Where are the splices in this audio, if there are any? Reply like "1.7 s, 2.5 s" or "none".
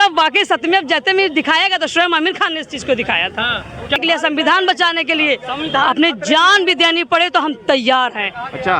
4.0 s